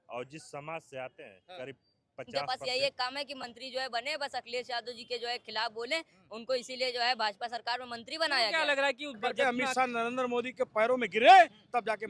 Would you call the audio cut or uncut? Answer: cut